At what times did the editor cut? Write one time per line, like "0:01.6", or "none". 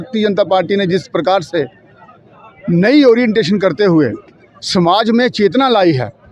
none